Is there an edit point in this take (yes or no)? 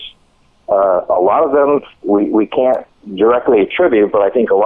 no